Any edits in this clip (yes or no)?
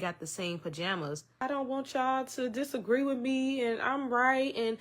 yes